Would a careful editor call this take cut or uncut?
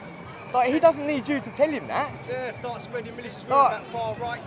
uncut